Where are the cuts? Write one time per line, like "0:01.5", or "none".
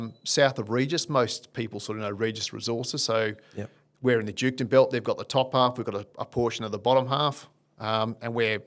none